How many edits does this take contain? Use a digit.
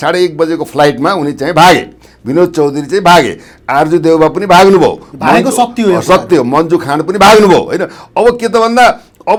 0